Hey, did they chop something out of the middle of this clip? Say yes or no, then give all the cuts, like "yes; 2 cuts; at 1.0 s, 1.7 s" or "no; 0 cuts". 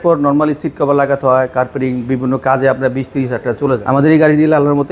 yes; 1 cut; at 3.8 s